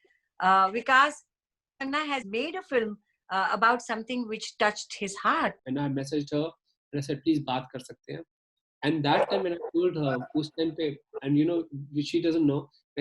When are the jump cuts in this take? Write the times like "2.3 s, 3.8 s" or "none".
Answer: 5.6 s